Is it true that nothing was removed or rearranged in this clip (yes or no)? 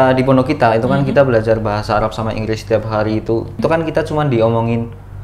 no